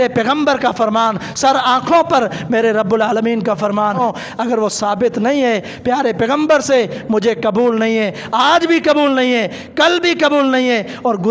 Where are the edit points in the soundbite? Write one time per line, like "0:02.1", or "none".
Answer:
0:04.0